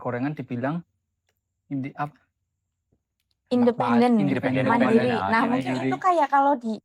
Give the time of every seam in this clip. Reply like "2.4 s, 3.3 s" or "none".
none